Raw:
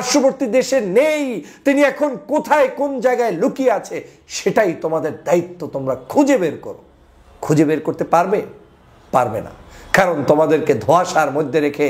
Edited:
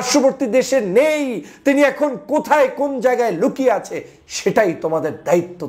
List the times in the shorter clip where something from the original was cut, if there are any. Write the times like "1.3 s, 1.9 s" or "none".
none